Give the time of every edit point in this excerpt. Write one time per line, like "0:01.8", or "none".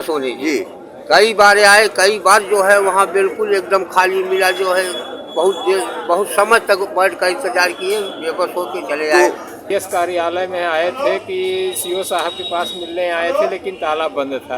0:09.6

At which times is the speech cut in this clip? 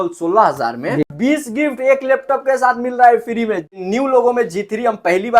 0:01.0
0:03.8

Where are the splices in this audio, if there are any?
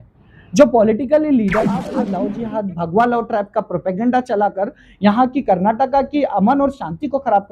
0:02.1

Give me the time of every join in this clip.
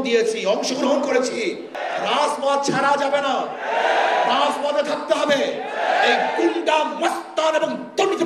0:01.7

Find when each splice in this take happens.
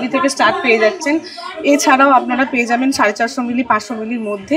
none

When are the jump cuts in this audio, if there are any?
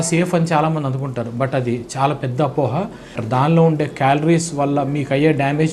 0:03.2

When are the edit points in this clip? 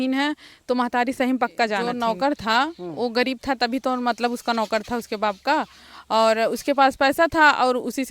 0:01.9

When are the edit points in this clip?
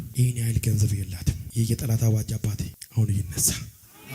0:01.4
0:02.8

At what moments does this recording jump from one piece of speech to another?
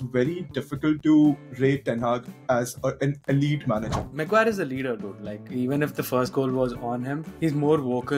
0:04.0

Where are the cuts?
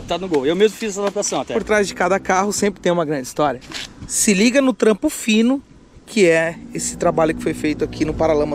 0:01.6
0:03.6

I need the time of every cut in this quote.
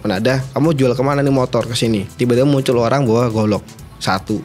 0:02.1

